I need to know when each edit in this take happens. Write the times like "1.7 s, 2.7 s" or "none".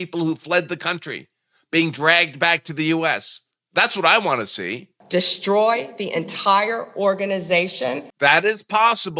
4.9 s, 8.0 s